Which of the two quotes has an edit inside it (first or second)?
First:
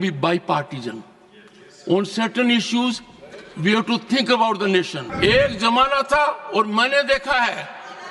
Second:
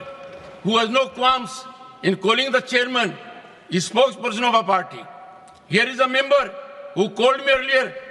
first